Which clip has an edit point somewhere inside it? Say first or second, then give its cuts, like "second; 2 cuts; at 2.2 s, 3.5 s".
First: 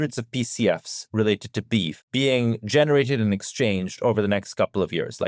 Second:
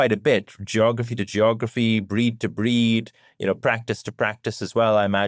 first; 1 cut; at 2.0 s